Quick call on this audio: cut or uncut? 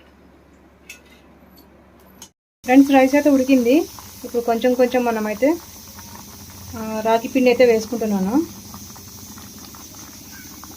cut